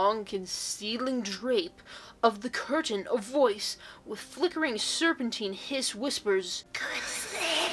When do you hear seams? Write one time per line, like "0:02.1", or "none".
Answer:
none